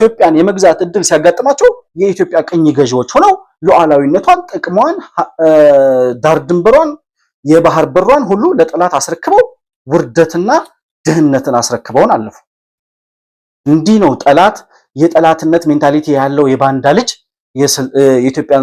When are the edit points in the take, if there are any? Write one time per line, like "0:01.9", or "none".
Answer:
none